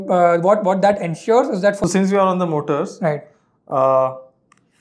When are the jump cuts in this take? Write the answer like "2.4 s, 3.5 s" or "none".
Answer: 1.8 s